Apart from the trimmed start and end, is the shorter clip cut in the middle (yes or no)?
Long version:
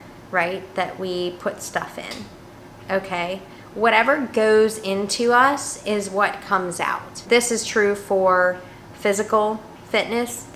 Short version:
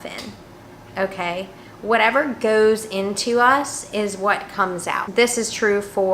yes